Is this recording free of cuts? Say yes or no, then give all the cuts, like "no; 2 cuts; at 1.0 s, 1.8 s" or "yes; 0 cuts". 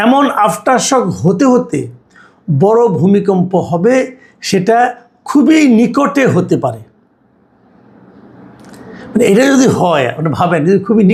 yes; 0 cuts